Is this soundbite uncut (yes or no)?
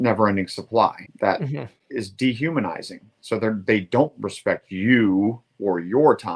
no